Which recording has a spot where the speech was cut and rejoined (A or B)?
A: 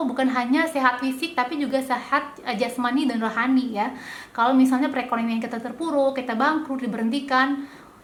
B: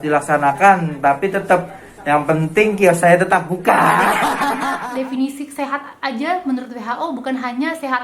B